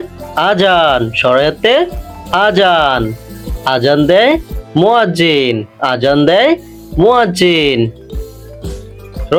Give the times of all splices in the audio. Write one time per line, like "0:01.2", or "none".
none

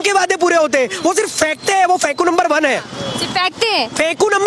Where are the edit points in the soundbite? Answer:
none

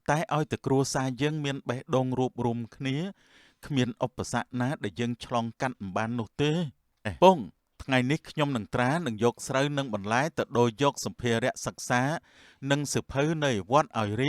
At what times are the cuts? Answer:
0:07.1

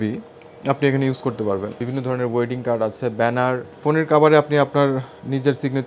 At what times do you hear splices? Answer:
0:01.8
0:03.1

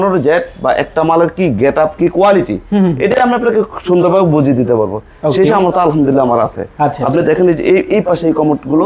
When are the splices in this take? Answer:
none

